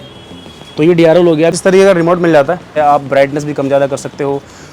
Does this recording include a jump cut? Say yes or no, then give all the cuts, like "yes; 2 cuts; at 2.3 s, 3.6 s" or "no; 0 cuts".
yes; 2 cuts; at 1.6 s, 2.7 s